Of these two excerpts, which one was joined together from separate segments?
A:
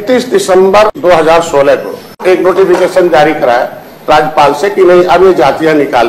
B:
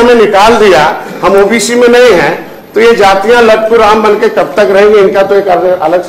A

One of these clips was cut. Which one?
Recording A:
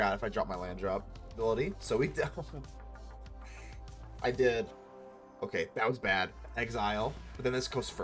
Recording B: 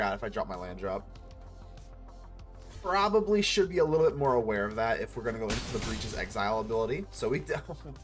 A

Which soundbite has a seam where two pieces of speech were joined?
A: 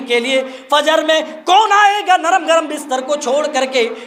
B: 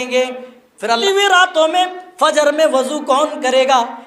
B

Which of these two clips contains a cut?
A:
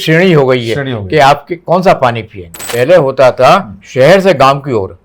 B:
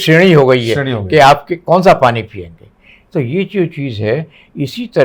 A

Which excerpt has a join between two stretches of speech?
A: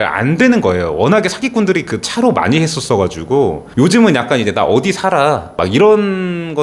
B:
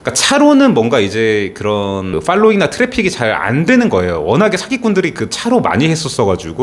A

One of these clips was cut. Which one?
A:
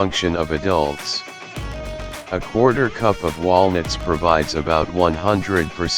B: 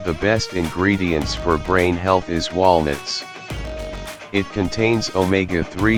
A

